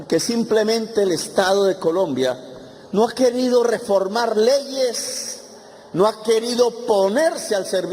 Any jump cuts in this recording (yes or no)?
no